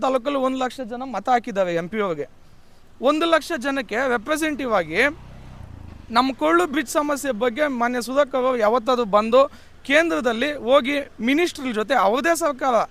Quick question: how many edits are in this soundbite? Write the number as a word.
zero